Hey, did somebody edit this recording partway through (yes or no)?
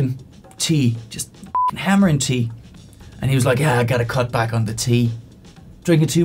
no